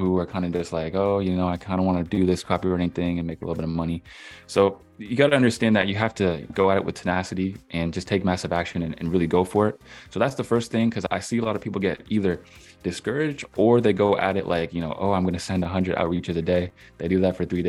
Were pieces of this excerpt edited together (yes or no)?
no